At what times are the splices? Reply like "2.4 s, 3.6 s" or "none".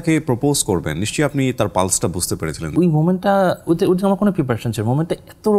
2.7 s